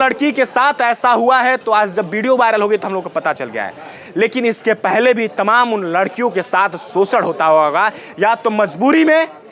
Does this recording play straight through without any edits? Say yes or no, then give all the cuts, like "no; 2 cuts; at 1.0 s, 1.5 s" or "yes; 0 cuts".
yes; 0 cuts